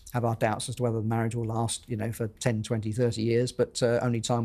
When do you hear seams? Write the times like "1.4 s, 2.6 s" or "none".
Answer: none